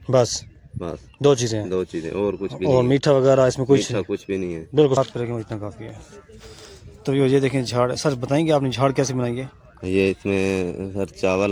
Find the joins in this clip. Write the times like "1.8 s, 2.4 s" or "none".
5.0 s